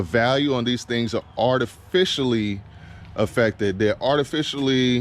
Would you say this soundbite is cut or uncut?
uncut